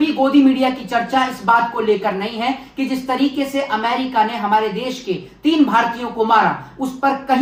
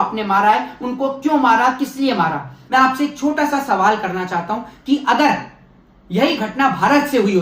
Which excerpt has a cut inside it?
second; 1 cut; at 2.5 s

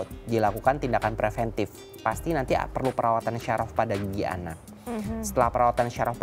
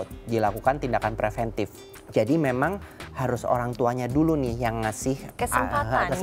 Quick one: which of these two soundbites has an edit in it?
second; 2 cuts; at 1.9 s, 5.3 s

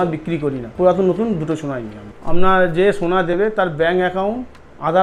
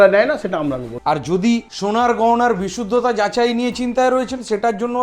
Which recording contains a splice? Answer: second; 2 cuts; at 0.9 s, 1.7 s

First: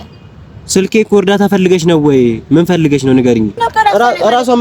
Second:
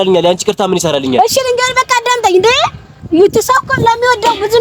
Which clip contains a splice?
first; 1 cut; at 3.6 s

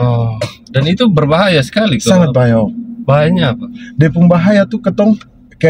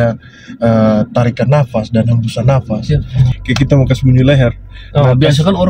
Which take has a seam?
second; 1 cut; at 2.8 s

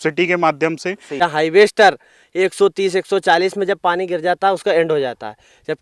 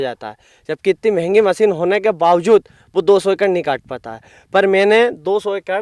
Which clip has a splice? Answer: first; 1 cut; at 1.1 s

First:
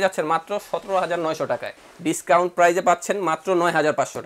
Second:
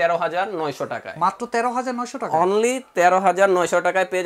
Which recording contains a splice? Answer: first; 1 cut; at 1.7 s

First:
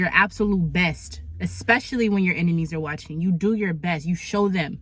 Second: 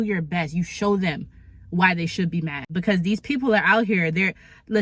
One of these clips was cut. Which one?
second; 1 cut; at 2.7 s

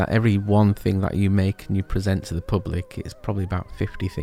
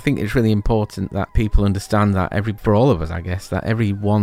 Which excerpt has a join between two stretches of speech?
second; 2 cuts; at 1.3 s, 2.5 s

